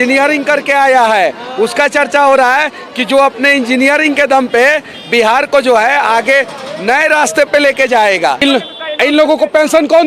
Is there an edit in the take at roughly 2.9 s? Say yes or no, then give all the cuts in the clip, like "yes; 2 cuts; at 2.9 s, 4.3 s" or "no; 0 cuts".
no; 1 cut; at 8.4 s